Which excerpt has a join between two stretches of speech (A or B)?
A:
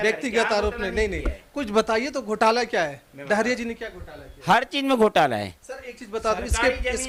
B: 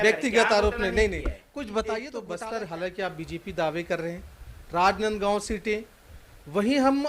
B